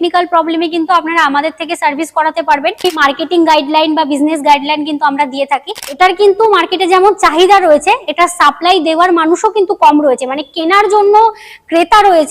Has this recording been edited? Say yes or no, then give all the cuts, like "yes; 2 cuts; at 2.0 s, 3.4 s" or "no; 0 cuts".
yes; 2 cuts; at 2.9 s, 5.9 s